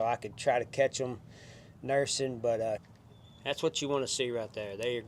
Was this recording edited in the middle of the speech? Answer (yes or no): yes